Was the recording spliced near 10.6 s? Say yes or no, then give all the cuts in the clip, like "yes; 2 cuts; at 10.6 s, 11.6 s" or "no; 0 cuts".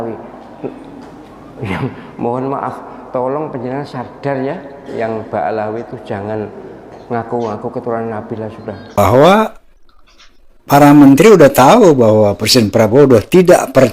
no; 1 cut; at 9.0 s